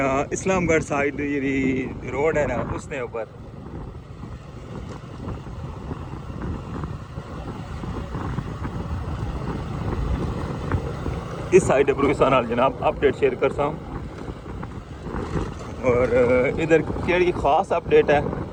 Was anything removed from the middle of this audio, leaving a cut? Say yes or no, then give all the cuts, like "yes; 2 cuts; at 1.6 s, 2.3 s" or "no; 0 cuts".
no; 0 cuts